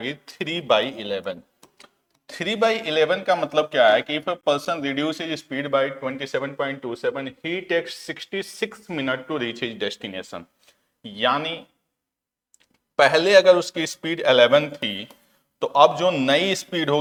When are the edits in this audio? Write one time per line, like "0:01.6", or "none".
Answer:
none